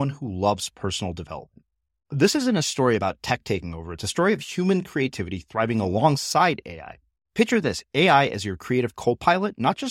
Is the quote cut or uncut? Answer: uncut